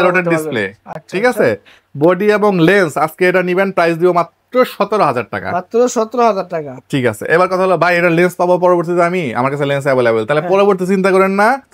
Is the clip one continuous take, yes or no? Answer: yes